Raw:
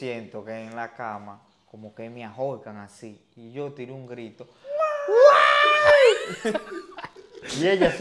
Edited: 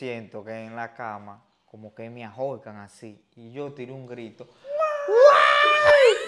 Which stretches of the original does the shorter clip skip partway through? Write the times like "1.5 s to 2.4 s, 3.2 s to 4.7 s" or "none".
none